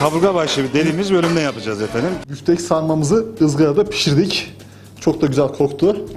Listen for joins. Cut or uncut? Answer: cut